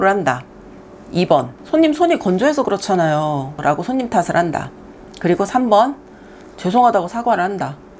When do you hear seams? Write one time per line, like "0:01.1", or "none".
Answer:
0:01.6
0:03.6